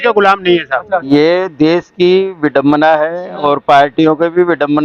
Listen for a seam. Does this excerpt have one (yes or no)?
yes